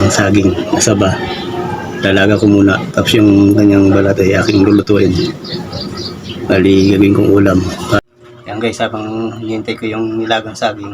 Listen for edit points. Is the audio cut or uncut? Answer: cut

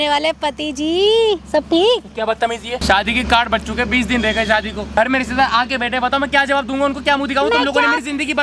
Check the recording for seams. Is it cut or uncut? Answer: cut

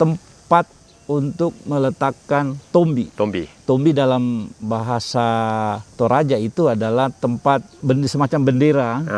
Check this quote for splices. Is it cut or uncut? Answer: cut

